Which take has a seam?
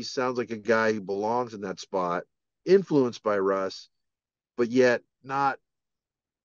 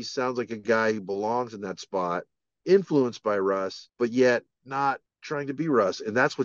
second; 2 cuts; at 3.8 s, 5.1 s

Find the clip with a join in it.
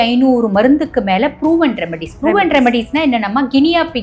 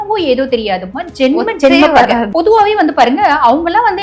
second; 1 cut; at 2.3 s

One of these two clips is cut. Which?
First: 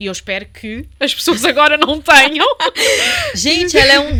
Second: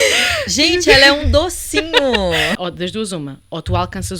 second; 1 cut; at 2.6 s

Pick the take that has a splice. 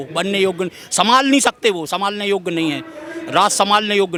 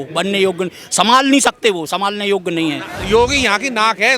second; 1 cut; at 2.9 s

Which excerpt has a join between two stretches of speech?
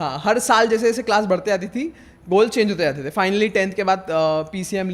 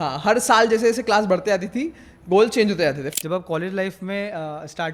second; 1 cut; at 3.0 s

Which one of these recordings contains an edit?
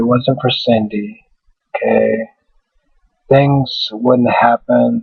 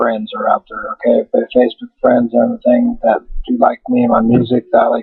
second; 1 cut; at 1.5 s

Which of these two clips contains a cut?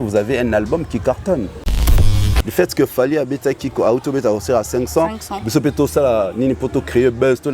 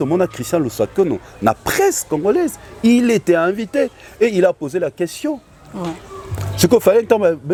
first; 1 cut; at 2.1 s

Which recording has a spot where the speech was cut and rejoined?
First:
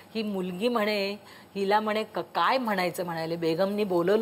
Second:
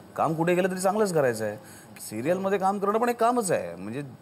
second; 1 cut; at 1.9 s

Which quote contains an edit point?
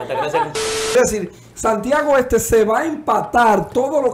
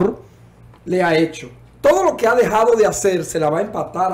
first; 1 cut; at 0.9 s

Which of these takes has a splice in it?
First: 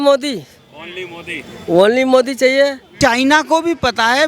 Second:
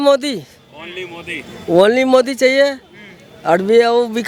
first; 1 cut; at 2.9 s

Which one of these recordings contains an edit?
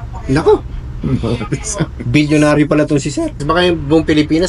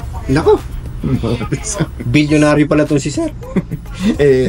first; 1 cut; at 3.4 s

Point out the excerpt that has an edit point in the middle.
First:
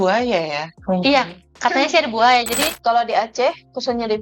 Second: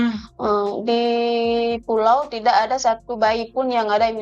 first; 1 cut; at 2.7 s

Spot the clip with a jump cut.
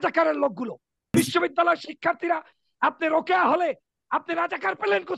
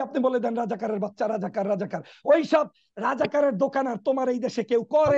first; 1 cut; at 1.2 s

